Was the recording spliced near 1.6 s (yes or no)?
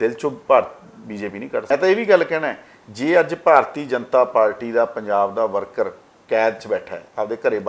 yes